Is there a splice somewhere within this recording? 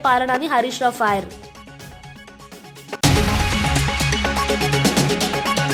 no; 0 cuts

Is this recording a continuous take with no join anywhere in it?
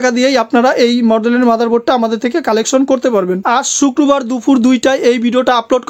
no; 1 cut; at 3.4 s

